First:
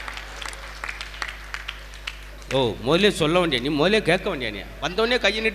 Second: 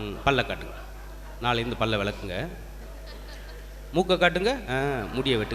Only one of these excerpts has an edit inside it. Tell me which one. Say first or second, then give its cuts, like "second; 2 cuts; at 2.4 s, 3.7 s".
first; 1 cut; at 2.4 s